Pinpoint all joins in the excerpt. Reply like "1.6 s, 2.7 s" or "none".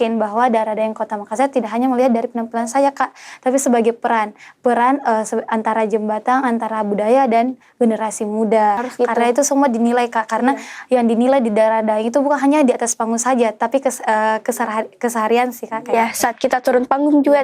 8.8 s